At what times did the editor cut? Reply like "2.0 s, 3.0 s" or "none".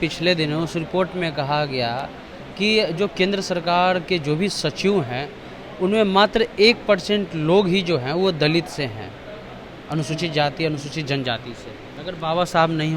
11.8 s